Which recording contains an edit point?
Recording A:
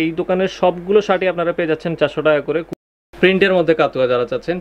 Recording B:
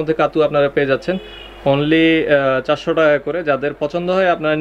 A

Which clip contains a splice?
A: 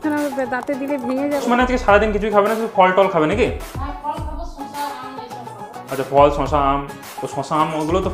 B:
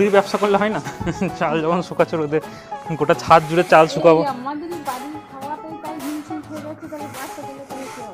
A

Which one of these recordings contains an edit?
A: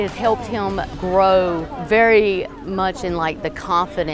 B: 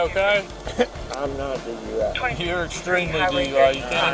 A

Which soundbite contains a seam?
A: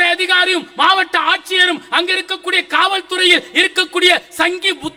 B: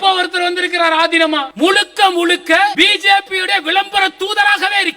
B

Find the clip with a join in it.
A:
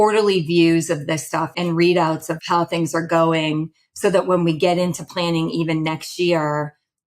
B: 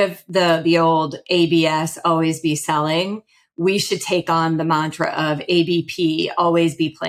A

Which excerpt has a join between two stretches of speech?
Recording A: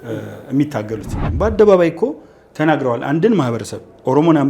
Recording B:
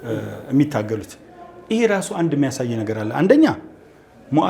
A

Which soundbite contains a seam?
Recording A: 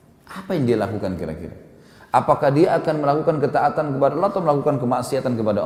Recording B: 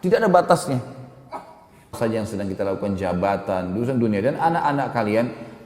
B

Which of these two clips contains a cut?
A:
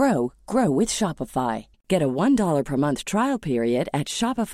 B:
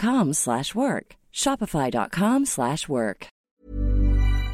B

